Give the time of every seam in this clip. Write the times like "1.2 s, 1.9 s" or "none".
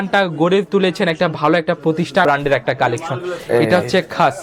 2.2 s